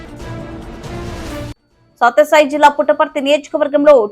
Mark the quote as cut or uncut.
cut